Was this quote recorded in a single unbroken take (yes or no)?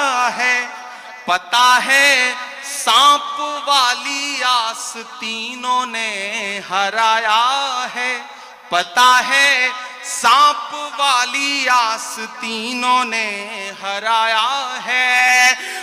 yes